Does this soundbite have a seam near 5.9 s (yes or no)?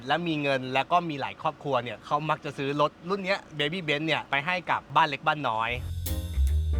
yes